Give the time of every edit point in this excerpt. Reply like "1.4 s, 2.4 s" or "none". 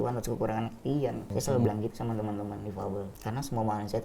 1.3 s, 3.1 s